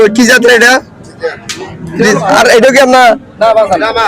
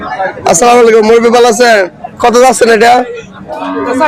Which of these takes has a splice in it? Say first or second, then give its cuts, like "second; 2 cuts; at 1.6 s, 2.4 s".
first; 1 cut; at 2.3 s